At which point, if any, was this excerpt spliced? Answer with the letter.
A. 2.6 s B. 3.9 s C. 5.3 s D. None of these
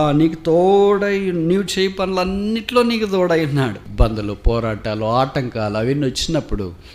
B